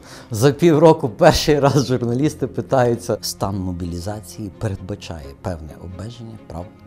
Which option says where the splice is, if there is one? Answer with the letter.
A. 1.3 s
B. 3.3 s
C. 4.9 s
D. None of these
B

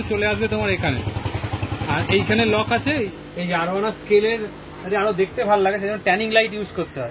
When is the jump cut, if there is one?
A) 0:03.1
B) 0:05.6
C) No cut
A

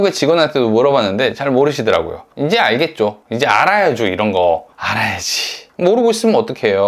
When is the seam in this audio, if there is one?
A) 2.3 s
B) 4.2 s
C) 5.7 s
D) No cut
A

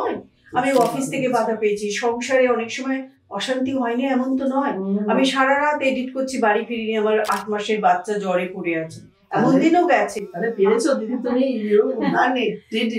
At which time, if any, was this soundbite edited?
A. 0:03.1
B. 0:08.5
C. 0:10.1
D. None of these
D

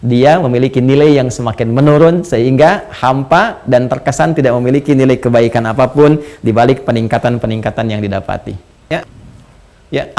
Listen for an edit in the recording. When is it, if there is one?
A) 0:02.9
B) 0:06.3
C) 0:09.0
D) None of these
C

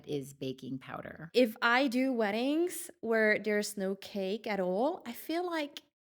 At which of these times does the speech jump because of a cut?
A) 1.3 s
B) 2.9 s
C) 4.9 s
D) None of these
A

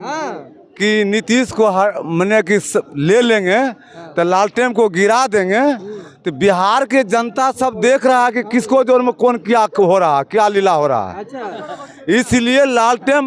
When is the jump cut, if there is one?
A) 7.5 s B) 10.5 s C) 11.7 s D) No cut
D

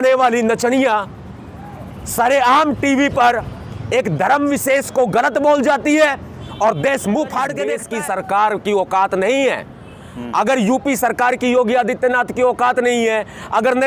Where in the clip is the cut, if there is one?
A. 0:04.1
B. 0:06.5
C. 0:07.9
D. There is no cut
C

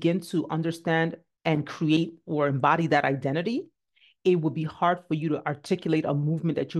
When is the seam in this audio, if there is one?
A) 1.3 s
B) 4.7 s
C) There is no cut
A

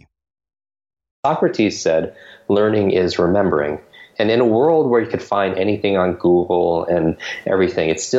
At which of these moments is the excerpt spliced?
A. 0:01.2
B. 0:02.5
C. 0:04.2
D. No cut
A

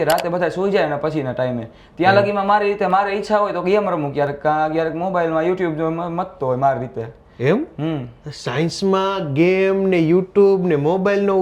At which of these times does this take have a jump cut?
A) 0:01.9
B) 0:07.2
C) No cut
C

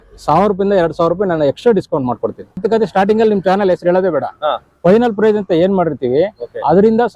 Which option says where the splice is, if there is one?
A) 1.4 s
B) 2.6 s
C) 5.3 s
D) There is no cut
B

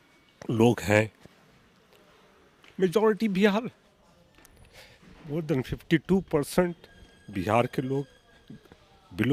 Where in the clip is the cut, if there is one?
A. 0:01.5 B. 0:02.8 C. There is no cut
C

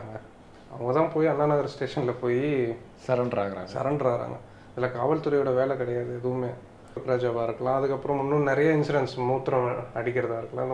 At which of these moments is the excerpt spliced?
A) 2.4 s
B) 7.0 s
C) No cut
B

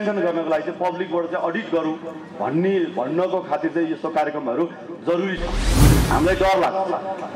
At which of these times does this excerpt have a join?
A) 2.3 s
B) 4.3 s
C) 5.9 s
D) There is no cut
C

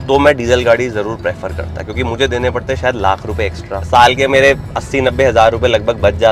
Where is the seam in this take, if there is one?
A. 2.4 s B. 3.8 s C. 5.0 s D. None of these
B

